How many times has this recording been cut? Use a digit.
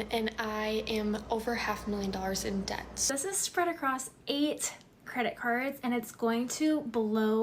1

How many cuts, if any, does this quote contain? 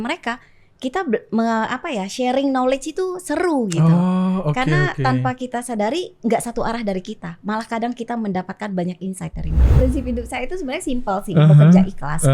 1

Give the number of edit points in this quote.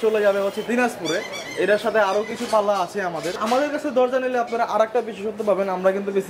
1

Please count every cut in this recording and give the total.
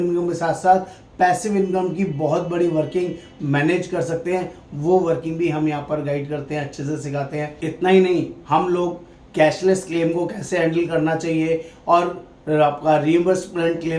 1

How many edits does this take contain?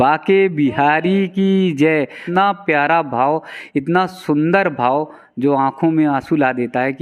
1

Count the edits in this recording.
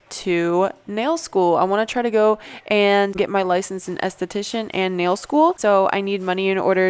2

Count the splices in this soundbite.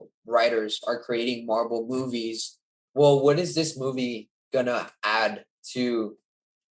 1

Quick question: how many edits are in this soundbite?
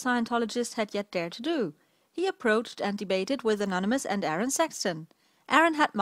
0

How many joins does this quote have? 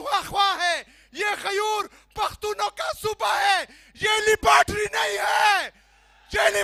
0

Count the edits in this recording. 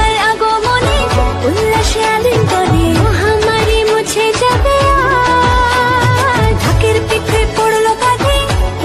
0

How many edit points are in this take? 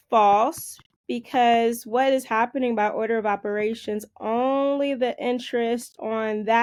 0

